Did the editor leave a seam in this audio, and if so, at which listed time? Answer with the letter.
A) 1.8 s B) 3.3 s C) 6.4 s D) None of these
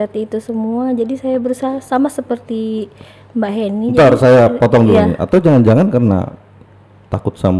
D